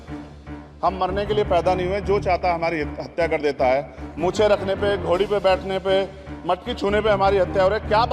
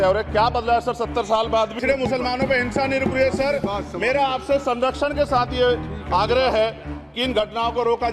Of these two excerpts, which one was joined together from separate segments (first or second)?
second